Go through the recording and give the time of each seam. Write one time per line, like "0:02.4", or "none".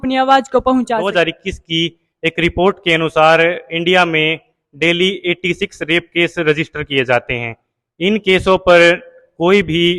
0:01.1